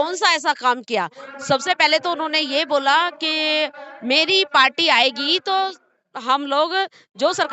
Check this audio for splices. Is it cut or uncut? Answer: uncut